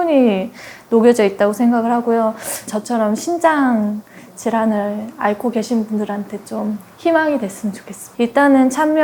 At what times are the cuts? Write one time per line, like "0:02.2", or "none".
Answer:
0:02.6
0:08.0